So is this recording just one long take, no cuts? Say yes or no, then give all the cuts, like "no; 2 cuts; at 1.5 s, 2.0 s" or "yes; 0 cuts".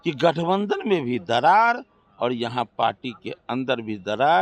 yes; 0 cuts